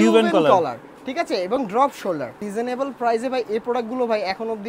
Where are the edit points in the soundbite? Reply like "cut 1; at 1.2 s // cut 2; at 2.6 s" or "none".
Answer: cut 1; at 2.4 s